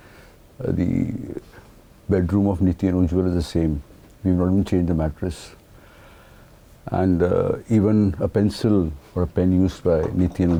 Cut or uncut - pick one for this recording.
uncut